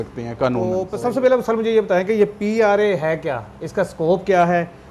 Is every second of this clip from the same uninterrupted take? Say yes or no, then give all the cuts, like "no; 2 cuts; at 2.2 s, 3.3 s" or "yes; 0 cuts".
no; 1 cut; at 0.9 s